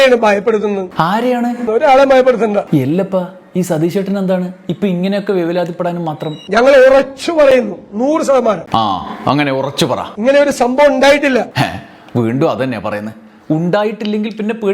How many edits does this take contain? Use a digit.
3